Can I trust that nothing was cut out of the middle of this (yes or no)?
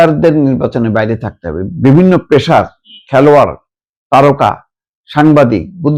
yes